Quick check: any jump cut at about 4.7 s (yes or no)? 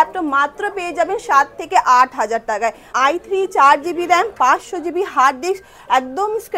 no